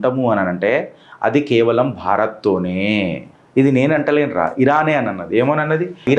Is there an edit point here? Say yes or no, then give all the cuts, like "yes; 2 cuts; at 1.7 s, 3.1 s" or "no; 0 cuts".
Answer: no; 0 cuts